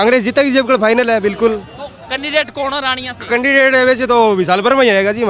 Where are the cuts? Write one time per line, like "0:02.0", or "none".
none